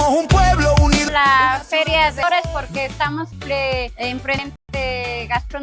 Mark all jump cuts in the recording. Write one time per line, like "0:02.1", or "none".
0:01.1
0:02.2
0:03.3
0:04.5

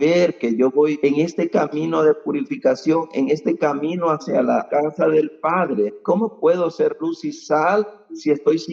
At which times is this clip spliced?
0:01.0
0:04.7
0:06.0

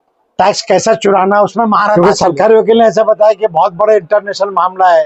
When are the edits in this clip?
0:02.0

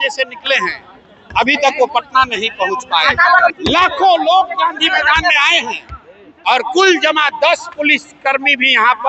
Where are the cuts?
0:03.5

